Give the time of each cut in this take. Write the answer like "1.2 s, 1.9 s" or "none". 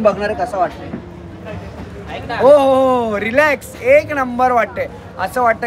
none

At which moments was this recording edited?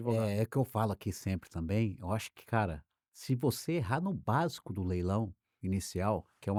none

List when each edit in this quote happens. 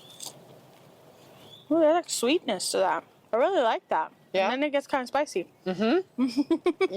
1.2 s, 3.1 s

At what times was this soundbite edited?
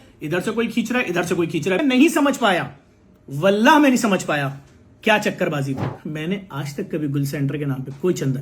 1.8 s, 5.8 s

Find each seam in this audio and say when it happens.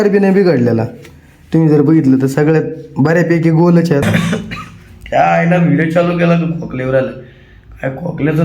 4.0 s

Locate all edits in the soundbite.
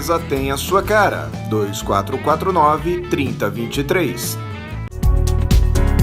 4.9 s

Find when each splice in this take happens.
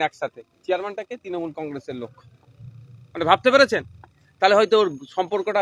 none

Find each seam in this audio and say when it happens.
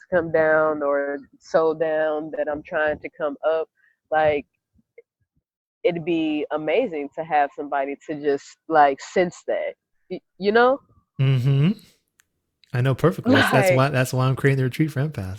none

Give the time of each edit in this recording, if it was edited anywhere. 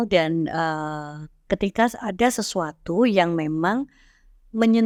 none

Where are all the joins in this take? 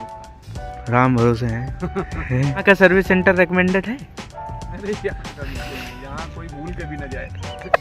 2.6 s

